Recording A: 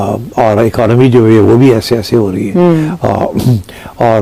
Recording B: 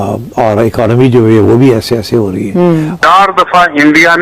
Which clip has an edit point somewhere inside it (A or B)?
B